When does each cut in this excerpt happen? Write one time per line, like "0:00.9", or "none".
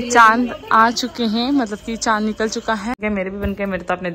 0:03.0

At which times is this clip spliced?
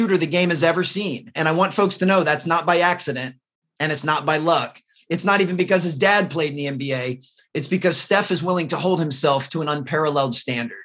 0:01.2

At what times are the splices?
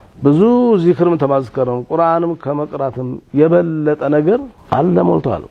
0:04.6

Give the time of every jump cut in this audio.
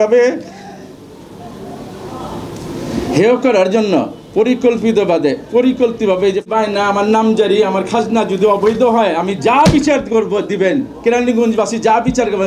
0:06.5

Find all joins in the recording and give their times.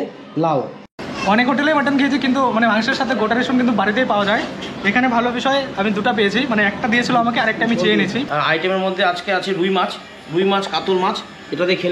0:00.9
0:08.3

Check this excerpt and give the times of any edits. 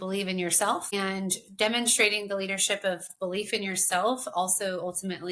0:00.9
0:03.1

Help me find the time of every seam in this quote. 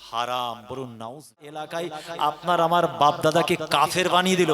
0:01.7

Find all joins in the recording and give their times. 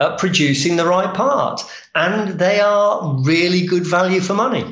none

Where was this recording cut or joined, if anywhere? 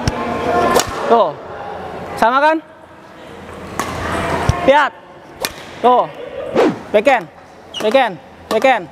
0:06.5

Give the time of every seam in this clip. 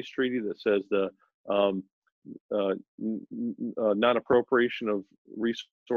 none

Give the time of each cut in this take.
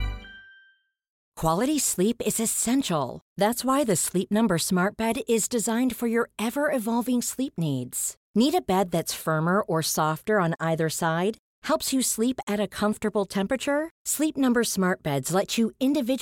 0:01.2

